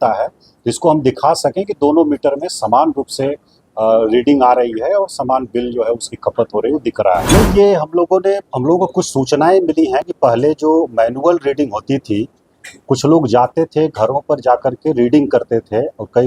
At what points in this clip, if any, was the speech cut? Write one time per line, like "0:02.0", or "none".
0:07.2